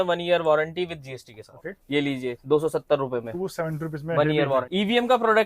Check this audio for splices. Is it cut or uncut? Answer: cut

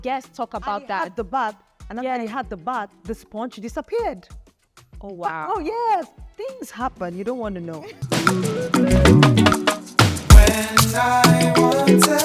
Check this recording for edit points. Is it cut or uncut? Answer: cut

